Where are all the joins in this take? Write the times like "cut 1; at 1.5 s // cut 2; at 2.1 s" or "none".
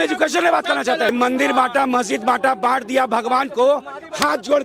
cut 1; at 1.1 s